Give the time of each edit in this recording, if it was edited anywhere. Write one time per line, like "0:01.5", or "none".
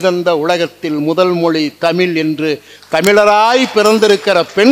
none

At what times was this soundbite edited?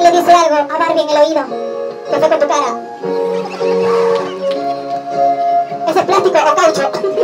none

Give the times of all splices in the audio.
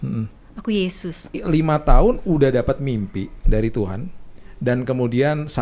0:01.4

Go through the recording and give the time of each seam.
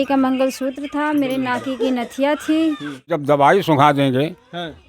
0:03.1

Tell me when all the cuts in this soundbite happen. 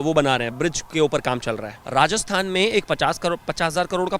0:01.7

